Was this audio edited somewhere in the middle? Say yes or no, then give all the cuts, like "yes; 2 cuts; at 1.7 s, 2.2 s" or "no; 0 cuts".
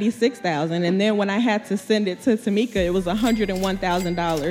no; 0 cuts